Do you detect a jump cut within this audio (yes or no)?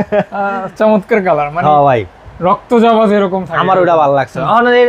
no